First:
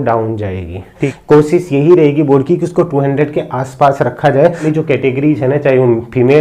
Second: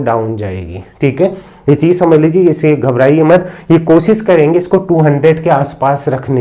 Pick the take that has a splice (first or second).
first